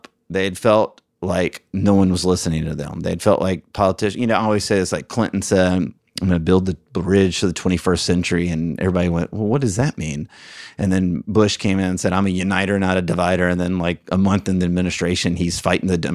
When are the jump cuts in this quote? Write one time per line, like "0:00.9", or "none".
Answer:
none

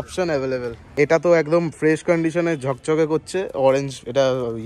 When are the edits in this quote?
0:00.9

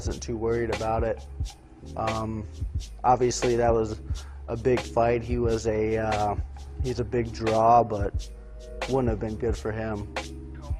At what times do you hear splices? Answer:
0:04.6

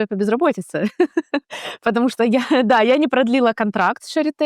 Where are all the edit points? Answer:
none

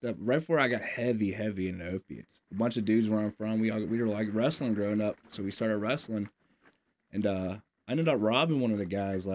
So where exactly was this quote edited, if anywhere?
0:02.5

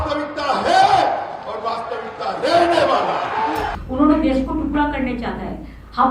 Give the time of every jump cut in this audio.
0:03.8

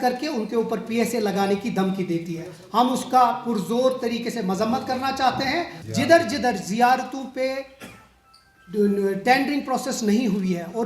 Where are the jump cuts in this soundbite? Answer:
0:05.8

